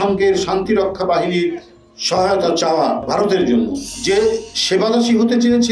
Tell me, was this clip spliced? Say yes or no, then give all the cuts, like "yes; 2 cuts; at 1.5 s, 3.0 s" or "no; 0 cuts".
yes; 2 cuts; at 3.0 s, 3.9 s